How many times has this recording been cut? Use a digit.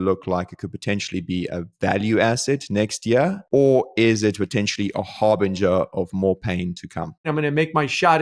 1